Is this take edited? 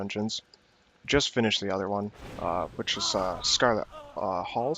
no; 0 cuts

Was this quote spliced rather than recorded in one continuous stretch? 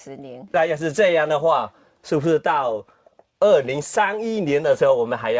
no; 0 cuts

